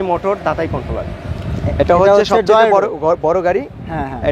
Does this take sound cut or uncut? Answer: uncut